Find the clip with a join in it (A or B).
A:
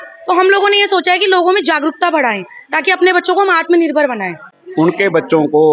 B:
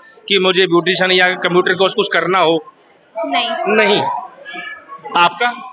A